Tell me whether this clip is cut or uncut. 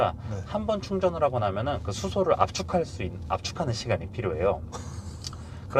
uncut